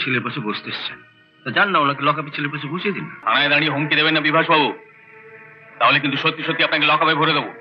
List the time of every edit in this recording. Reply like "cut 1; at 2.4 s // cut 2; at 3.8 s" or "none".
cut 1; at 3.2 s